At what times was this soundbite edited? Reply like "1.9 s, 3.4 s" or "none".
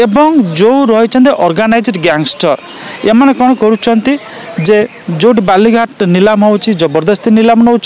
none